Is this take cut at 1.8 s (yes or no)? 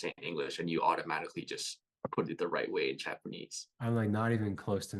no